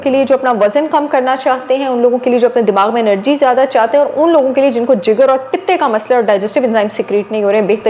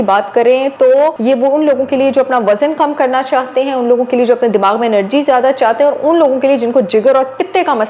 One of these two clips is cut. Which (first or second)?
second